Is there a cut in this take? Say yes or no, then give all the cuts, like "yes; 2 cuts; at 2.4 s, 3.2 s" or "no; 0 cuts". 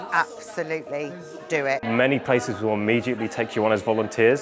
yes; 1 cut; at 1.9 s